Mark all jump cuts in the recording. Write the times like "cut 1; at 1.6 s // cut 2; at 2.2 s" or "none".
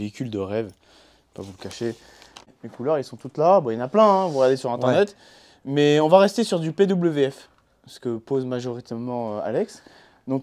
cut 1; at 2.5 s